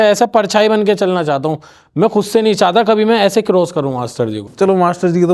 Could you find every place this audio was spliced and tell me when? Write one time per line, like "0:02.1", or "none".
0:04.4